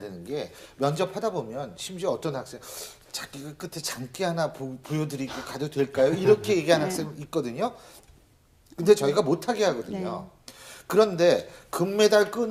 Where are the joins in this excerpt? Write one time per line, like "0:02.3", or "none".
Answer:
none